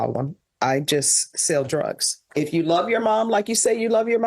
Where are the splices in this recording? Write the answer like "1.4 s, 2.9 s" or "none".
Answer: 2.2 s